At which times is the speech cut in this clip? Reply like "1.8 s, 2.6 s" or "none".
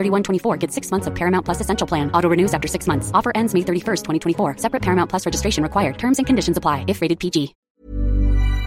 7.6 s